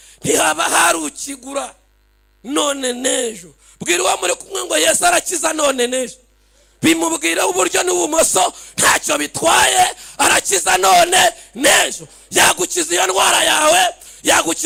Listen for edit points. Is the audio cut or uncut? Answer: uncut